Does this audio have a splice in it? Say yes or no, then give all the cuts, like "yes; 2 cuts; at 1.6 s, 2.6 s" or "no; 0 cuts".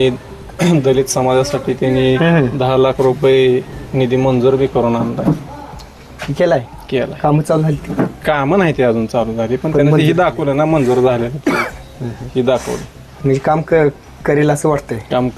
no; 0 cuts